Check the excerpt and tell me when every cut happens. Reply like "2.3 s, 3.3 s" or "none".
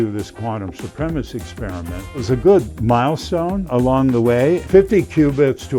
2.2 s, 3.7 s, 4.6 s